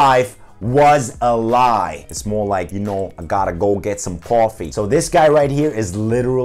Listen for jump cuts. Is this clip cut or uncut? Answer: cut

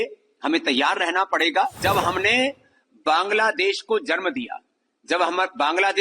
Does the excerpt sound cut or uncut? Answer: cut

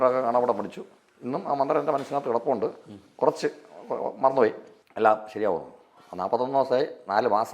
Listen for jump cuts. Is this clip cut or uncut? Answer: uncut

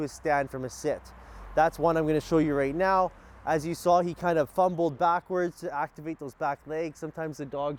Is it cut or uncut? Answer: uncut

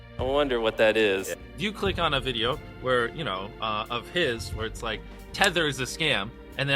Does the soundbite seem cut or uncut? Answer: cut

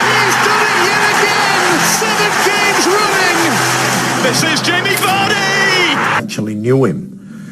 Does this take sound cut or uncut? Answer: uncut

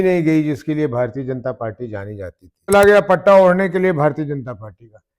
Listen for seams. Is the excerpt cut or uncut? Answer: cut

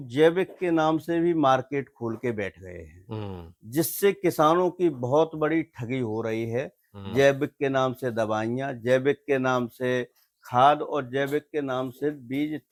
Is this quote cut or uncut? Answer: uncut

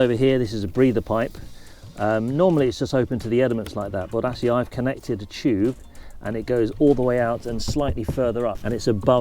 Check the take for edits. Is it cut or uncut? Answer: uncut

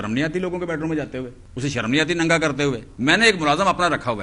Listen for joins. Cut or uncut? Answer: cut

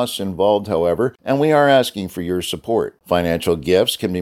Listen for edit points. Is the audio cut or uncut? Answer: cut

